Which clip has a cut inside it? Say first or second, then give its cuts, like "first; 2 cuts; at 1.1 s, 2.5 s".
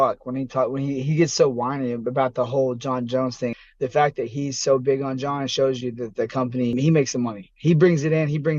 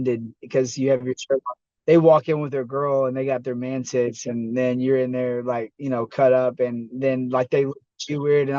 first; 2 cuts; at 3.6 s, 6.7 s